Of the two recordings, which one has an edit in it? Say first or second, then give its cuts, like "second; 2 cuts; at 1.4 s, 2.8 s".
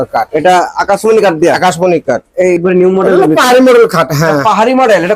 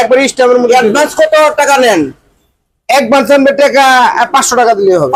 first; 1 cut; at 2.6 s